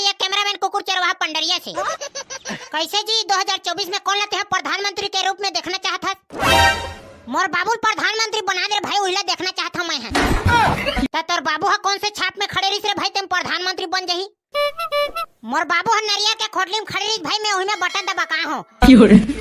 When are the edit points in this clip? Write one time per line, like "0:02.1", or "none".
0:02.6